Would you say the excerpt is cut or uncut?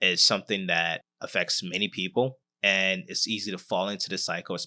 cut